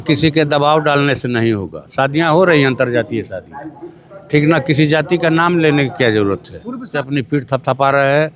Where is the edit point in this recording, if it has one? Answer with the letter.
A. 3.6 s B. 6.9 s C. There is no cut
B